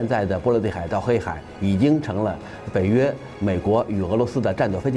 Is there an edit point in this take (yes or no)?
no